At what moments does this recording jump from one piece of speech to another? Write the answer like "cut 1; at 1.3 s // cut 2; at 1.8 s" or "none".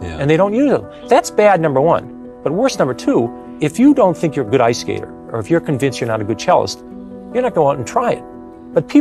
cut 1; at 0.9 s // cut 2; at 3.4 s